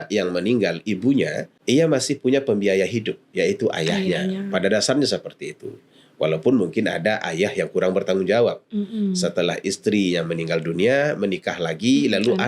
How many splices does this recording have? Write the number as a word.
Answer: one